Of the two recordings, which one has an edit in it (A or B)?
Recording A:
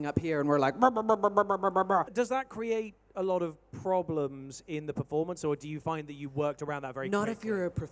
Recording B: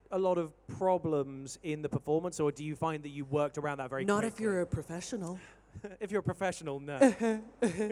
A